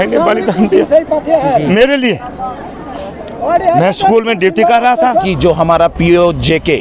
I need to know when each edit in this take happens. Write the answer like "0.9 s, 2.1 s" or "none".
5.3 s